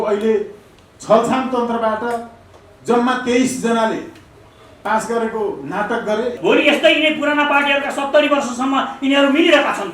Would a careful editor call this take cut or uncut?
cut